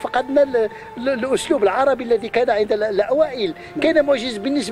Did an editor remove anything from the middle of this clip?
no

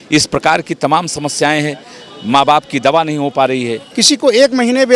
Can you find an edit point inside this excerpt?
yes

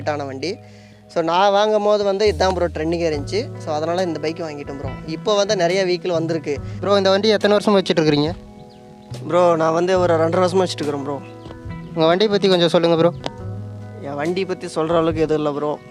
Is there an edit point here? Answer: yes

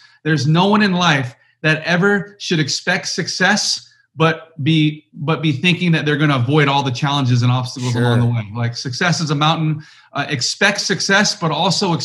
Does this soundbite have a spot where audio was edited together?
no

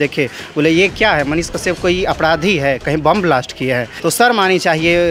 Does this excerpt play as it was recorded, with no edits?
no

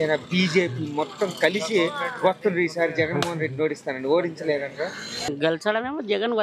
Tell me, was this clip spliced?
yes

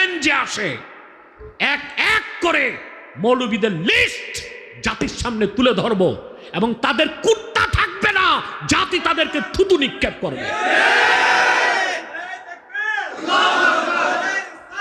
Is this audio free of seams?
yes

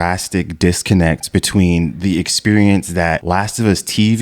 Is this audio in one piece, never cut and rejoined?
no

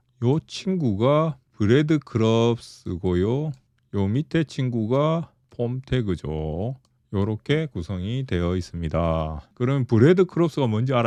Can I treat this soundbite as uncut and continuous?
yes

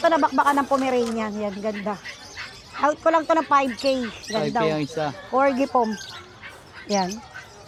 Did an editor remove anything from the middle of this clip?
no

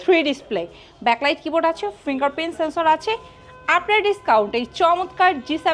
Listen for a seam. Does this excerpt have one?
no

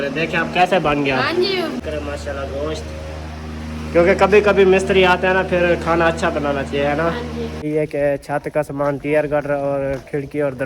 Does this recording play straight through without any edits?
no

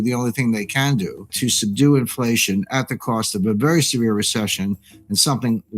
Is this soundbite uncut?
no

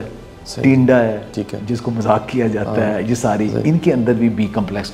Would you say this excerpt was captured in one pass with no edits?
yes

